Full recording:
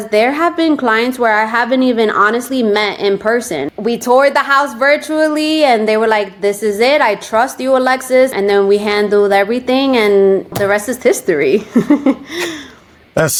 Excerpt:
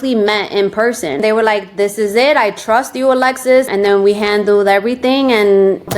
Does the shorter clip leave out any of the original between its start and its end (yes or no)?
yes